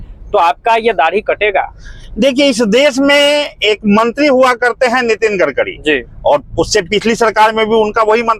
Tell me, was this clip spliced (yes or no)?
no